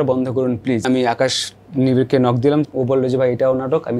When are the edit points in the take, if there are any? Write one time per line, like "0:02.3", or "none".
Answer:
0:00.8
0:02.6